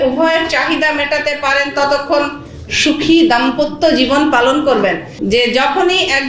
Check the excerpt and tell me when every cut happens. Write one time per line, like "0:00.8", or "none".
0:05.1